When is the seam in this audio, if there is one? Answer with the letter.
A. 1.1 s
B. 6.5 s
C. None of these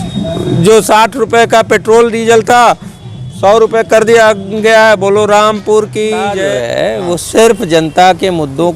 B